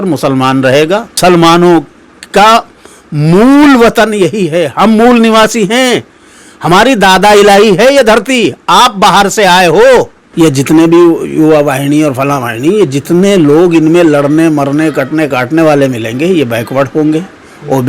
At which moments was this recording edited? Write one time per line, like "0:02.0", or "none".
0:01.2
0:10.2